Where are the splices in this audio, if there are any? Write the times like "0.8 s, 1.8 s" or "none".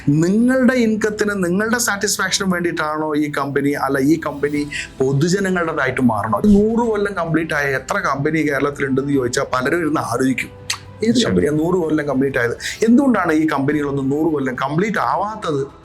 6.4 s